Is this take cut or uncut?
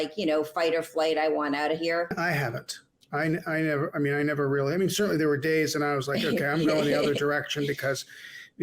cut